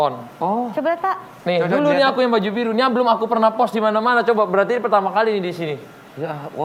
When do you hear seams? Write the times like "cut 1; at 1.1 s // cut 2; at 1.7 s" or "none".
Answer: none